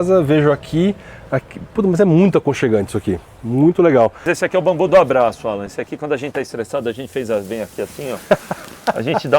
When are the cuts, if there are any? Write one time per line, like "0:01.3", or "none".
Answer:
0:04.3